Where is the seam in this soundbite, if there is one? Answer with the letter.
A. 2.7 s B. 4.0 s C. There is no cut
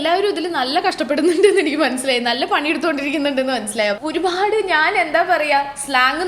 B